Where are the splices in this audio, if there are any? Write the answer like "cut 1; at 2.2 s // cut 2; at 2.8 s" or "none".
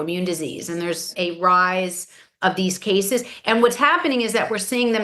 cut 1; at 1.1 s // cut 2; at 2.3 s